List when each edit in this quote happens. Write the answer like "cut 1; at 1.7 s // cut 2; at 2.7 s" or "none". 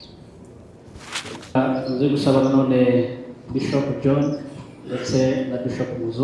cut 1; at 1.5 s